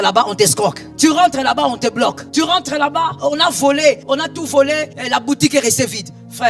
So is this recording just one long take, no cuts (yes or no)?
no